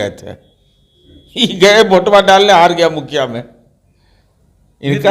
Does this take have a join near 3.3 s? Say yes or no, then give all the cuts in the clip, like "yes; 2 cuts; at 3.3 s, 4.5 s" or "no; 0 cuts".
no; 0 cuts